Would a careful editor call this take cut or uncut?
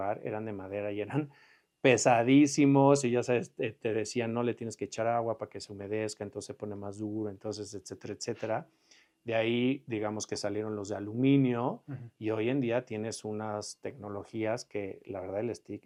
uncut